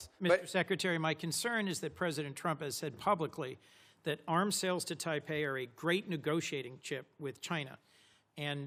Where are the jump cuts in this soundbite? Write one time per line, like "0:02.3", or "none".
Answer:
none